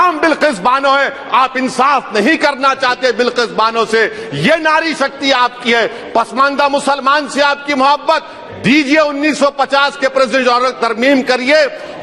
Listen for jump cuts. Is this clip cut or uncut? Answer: uncut